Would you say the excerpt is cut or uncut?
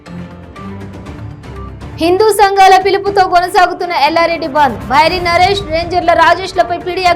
cut